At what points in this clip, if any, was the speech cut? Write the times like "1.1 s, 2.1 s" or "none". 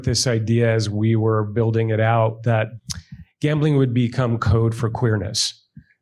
2.7 s